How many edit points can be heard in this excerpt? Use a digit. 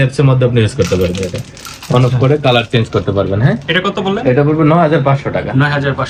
0